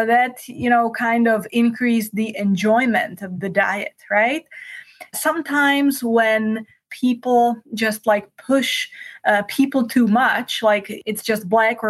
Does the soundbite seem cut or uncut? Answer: cut